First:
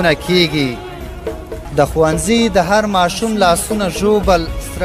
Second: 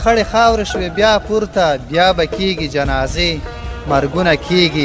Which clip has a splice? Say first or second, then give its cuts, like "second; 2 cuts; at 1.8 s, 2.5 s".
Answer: first; 1 cut; at 1.6 s